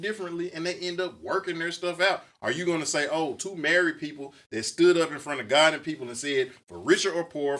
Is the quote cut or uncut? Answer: uncut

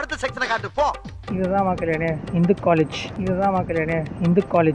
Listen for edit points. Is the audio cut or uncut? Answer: cut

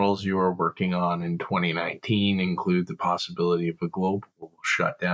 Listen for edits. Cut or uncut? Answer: uncut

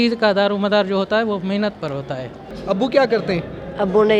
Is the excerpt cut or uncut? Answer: cut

